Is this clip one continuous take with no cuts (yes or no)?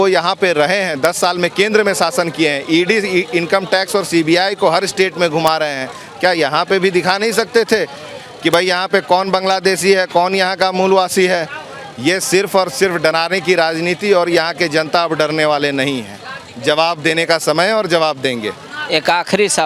yes